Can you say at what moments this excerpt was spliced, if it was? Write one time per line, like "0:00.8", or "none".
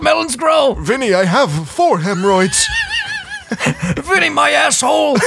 none

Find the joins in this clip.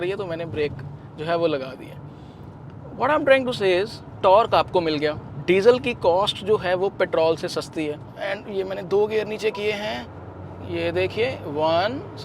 0:08.1

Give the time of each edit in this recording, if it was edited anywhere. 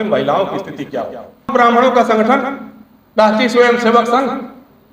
0:01.5

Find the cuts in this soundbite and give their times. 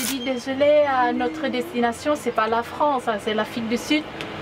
none

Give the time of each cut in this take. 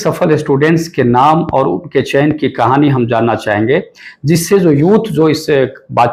none

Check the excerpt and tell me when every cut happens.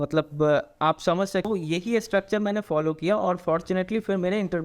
0:01.5

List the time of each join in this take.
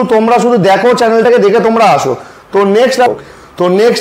0:03.1

